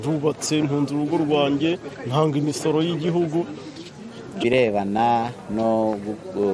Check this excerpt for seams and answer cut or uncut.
cut